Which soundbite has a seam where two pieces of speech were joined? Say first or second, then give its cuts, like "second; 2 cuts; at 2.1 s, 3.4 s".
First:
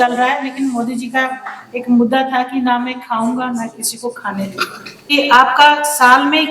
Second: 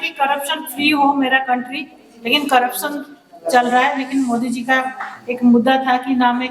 first; 1 cut; at 5.1 s